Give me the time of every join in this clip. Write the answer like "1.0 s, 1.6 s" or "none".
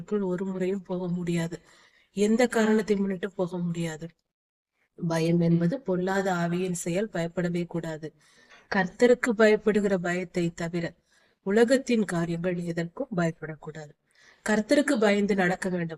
none